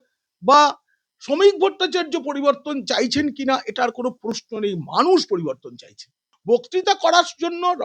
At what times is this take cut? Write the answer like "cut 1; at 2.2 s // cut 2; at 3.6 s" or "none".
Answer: cut 1; at 6.3 s